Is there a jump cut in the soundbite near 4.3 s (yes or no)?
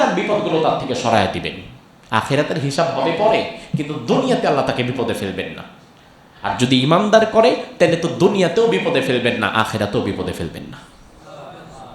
no